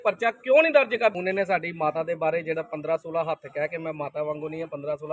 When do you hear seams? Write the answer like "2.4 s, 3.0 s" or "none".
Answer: 1.1 s

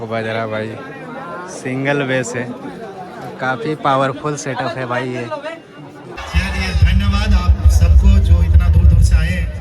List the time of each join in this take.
6.1 s

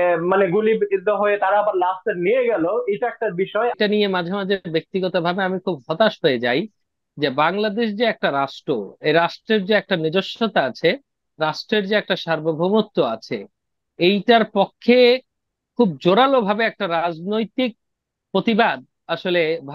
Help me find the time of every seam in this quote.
3.7 s

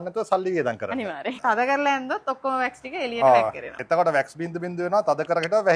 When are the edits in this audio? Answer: 1.4 s, 3.7 s

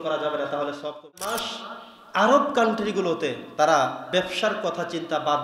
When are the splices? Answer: 1.4 s

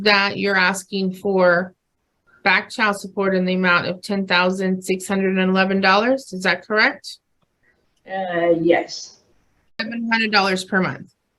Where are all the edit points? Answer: 9.9 s

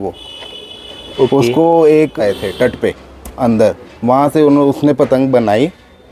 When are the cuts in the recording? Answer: 2.2 s

